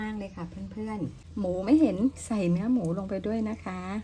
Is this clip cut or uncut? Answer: cut